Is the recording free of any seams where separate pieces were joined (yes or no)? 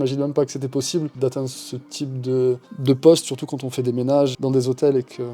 no